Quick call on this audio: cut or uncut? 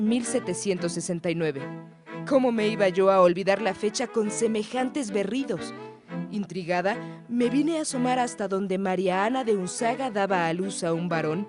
uncut